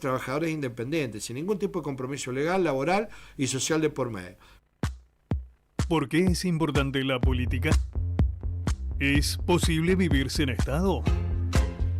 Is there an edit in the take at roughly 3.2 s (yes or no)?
no